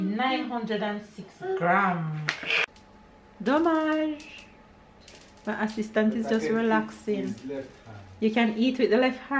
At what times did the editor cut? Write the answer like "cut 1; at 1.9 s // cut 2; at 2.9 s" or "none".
cut 1; at 2.6 s